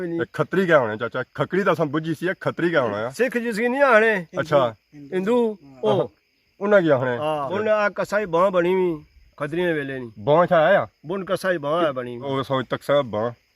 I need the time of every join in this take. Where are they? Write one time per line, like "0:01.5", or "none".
0:07.5
0:12.3